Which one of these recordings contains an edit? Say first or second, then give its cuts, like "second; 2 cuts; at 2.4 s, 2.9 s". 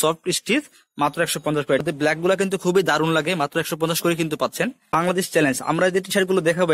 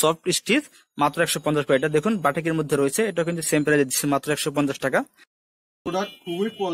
first; 2 cuts; at 1.8 s, 5.0 s